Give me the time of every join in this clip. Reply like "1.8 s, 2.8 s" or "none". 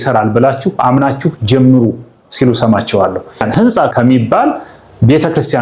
3.4 s